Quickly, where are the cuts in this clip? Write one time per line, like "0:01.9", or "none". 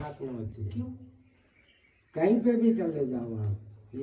none